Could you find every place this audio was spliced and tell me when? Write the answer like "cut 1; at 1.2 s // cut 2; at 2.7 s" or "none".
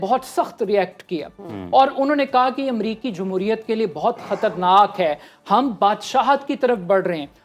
none

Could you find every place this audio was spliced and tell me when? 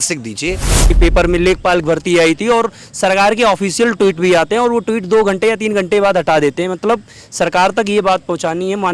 cut 1; at 1.0 s

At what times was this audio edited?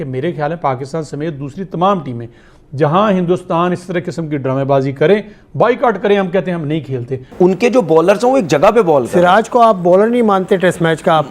cut 1; at 7.2 s

